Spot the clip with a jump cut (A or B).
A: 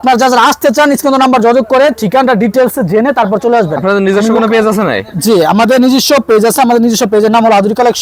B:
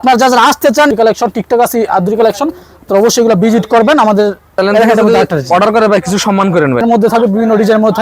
B